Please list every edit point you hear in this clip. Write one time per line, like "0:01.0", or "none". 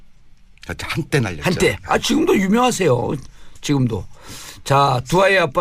0:04.5